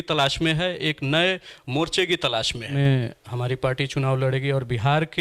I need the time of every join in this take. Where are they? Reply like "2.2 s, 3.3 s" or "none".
2.8 s